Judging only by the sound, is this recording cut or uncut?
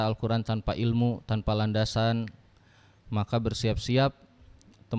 uncut